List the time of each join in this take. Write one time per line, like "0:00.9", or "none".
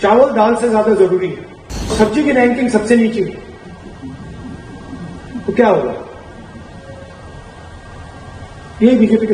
0:01.9